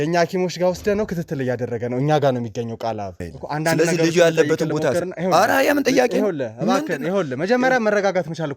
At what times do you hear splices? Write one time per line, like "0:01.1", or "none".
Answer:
0:03.2